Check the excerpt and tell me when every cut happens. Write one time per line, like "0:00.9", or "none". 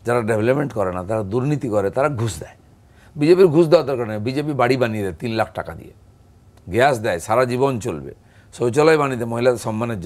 none